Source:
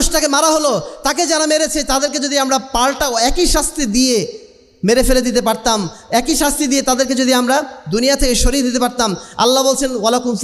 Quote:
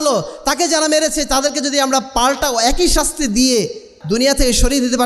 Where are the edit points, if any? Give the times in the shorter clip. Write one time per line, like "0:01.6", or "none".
0:04.0